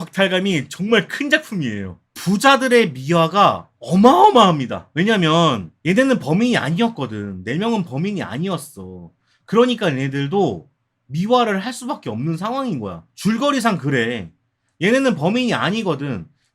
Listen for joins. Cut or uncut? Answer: cut